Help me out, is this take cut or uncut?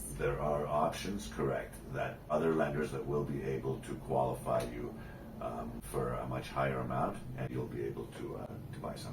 cut